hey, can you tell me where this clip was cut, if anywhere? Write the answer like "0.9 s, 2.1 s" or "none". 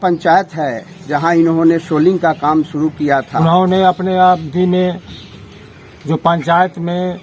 3.3 s